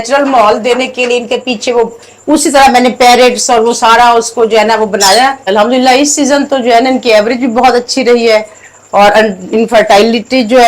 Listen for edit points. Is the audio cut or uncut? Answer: cut